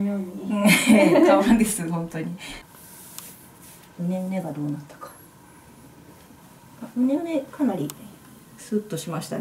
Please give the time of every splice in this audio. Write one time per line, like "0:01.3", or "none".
0:02.5